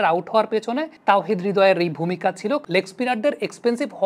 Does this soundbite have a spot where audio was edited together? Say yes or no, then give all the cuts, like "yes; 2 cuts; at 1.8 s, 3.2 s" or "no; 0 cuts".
yes; 2 cuts; at 0.9 s, 2.6 s